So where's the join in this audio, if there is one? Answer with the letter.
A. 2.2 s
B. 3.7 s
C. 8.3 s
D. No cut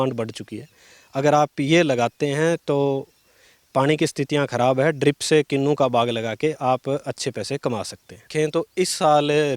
C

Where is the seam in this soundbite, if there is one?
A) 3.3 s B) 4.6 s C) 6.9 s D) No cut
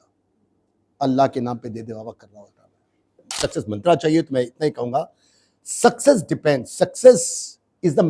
A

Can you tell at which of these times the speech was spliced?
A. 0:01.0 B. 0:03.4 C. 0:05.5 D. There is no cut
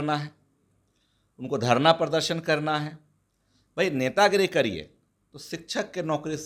D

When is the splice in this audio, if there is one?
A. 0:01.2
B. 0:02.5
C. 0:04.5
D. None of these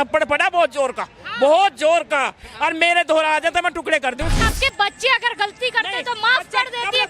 C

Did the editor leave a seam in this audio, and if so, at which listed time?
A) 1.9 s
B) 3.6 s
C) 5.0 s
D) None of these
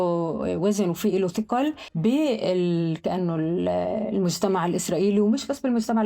A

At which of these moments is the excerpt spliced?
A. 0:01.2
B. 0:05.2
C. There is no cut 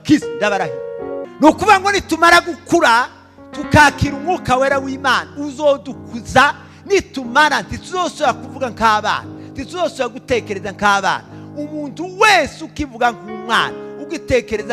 A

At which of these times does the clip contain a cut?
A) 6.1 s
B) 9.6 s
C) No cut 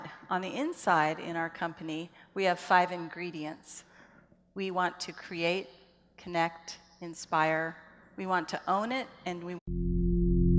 C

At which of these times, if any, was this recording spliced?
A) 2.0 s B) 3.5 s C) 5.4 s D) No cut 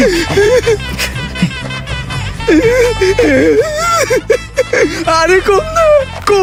D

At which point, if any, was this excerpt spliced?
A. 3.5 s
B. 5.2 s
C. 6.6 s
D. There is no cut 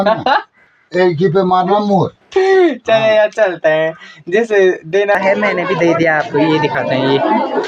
B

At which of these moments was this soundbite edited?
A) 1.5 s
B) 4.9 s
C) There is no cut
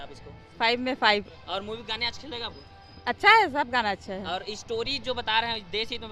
C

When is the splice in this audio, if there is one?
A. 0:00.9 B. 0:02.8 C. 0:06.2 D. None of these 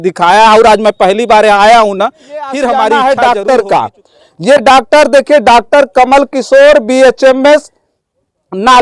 B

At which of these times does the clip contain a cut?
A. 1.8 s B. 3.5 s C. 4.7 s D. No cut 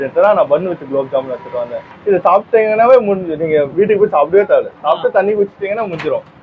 A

